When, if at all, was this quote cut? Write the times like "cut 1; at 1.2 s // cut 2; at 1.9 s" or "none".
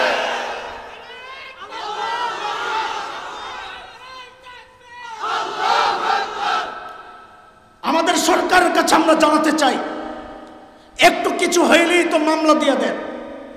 none